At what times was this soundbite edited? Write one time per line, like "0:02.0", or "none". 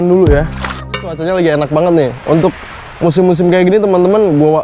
0:01.2